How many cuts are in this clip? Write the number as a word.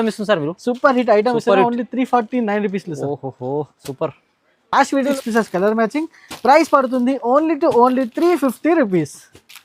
one